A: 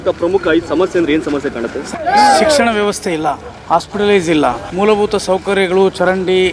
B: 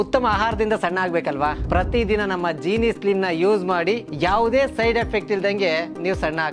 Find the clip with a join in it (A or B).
A